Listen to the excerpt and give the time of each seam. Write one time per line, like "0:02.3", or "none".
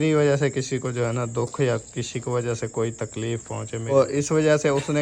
0:03.9

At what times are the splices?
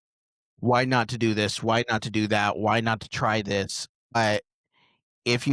0:04.1

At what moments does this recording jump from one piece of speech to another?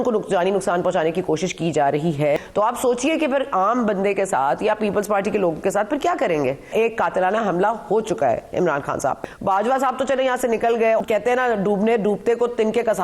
0:02.4
0:06.7
0:09.2
0:11.0

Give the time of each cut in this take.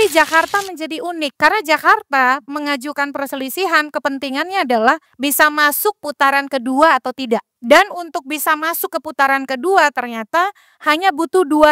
0:01.3
0:05.1
0:07.5

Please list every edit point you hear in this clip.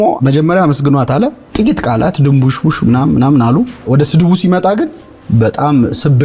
0:03.8

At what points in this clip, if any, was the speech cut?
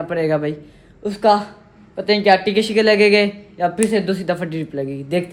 none

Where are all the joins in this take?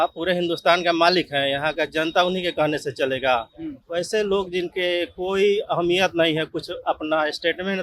none

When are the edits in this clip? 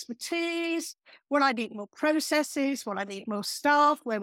none

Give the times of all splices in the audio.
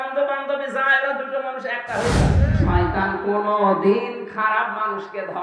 0:02.4

